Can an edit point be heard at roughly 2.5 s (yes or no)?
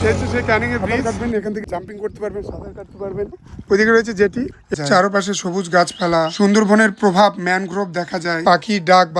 no